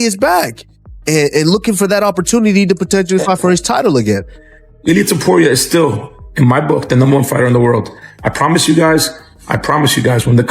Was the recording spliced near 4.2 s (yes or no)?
yes